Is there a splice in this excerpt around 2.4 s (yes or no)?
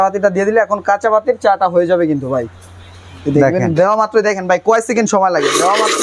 no